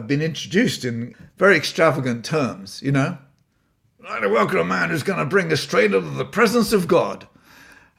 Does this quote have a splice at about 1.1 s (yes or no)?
yes